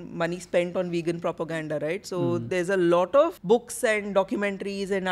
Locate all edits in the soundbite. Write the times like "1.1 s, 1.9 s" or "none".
3.4 s